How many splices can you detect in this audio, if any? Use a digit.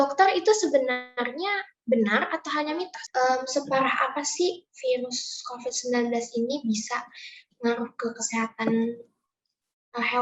1